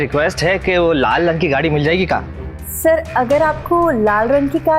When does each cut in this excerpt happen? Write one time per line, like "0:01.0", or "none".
none